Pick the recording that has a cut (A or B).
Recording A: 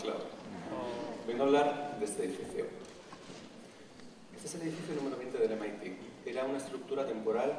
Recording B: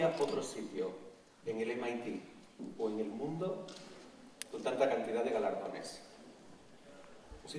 A